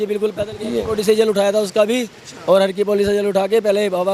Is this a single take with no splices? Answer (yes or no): yes